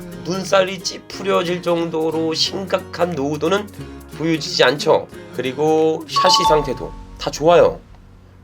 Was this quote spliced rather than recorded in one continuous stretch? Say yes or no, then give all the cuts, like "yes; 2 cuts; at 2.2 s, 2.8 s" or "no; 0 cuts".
yes; 1 cut; at 5.2 s